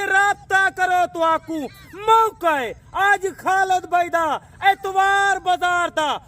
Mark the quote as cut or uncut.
uncut